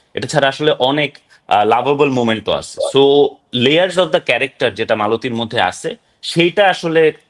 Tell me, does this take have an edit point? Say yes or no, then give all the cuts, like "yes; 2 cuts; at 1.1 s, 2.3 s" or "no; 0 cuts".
no; 0 cuts